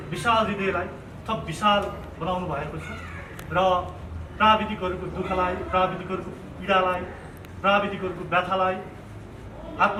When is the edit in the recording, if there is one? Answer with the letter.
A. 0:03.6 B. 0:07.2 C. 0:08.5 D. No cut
D